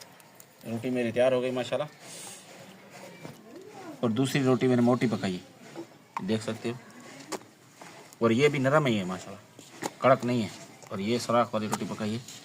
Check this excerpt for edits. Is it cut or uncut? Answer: cut